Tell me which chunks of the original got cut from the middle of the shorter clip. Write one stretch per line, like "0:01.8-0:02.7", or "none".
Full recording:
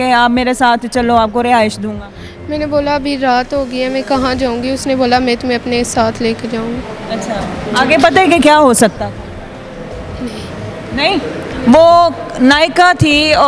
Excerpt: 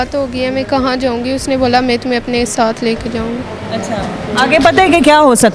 none